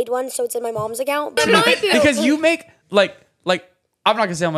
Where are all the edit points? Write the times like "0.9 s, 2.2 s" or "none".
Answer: 1.4 s